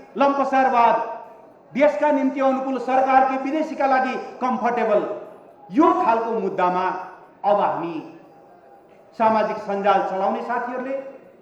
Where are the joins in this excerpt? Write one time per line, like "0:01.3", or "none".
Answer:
none

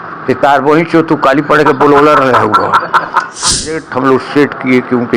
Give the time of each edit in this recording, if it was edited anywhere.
0:03.6

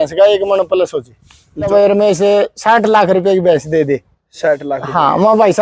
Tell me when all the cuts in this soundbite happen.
0:01.7

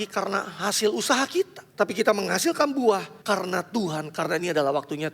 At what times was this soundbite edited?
0:01.6
0:03.1

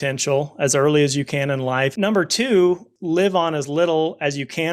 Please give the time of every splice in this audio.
0:01.9
0:02.9

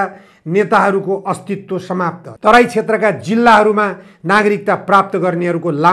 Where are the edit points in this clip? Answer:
0:02.2

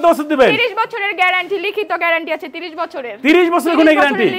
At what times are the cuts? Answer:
none

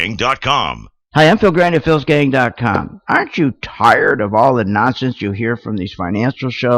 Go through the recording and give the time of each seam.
0:00.9

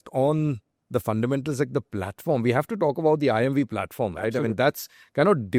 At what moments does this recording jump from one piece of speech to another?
none

